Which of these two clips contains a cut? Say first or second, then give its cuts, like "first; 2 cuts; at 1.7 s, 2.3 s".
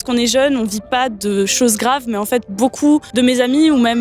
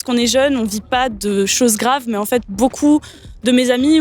first; 1 cut; at 3.1 s